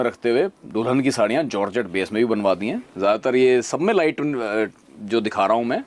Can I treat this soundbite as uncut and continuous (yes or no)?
yes